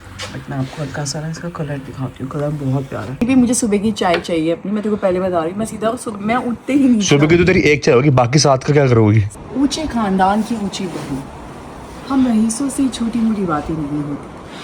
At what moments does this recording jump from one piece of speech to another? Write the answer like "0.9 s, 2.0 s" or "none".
3.2 s, 9.3 s

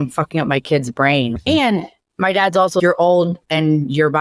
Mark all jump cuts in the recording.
none

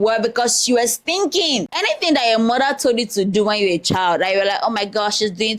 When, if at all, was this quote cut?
1.7 s

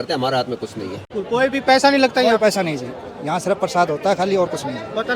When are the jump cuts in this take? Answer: 1.1 s

